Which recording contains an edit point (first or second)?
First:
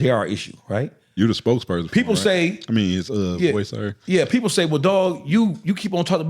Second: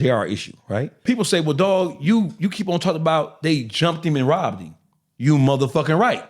second